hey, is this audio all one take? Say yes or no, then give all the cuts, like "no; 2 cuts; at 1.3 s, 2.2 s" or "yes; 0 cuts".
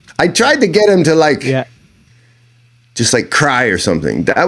yes; 0 cuts